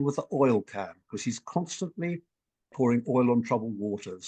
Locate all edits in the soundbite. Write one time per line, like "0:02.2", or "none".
0:02.7